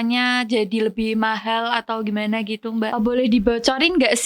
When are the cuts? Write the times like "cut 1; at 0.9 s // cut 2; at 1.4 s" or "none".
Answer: cut 1; at 2.9 s

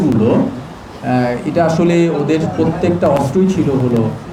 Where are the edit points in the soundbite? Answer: none

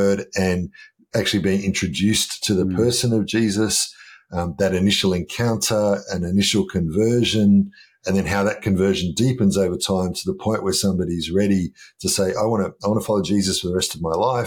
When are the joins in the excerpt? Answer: none

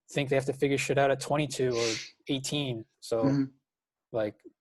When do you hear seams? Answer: cut 1; at 2.9 s

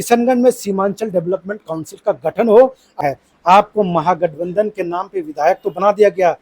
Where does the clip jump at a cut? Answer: cut 1; at 3.0 s

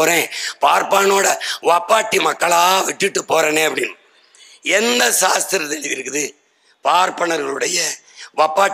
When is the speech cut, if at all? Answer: none

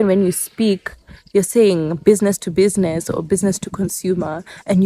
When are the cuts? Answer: none

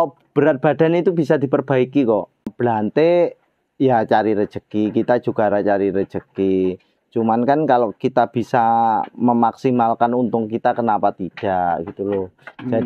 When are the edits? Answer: cut 1; at 2.5 s

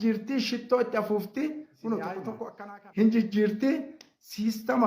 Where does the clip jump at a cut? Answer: cut 1; at 2.5 s

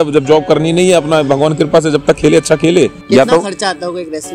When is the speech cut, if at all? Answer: cut 1; at 3.0 s

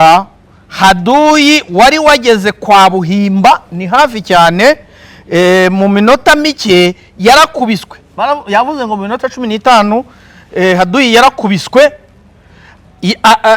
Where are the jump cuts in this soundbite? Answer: none

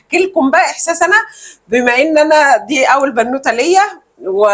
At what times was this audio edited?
none

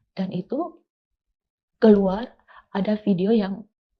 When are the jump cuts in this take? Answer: none

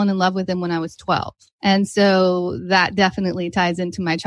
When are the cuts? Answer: cut 1; at 1.4 s

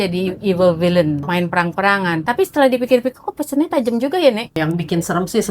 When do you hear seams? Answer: cut 1; at 1.2 s // cut 2; at 2.2 s // cut 3; at 4.6 s

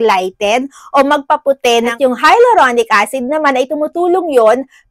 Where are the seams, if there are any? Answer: cut 1; at 1.9 s

